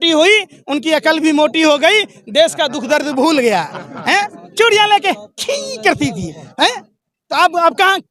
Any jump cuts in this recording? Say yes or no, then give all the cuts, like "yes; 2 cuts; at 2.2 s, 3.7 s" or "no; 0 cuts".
no; 0 cuts